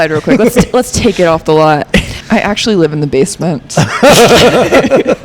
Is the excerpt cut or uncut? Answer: cut